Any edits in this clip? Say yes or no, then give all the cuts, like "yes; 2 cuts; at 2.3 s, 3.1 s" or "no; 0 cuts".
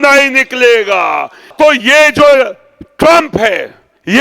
yes; 1 cut; at 1.4 s